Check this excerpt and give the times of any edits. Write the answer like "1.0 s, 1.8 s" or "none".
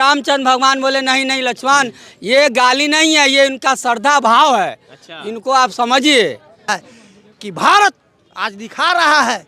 6.9 s